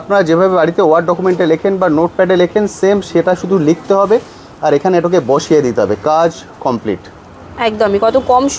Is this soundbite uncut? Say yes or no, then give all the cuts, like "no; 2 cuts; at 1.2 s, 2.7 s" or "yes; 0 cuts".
yes; 0 cuts